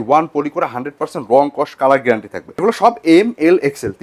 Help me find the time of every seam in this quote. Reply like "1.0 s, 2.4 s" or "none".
2.6 s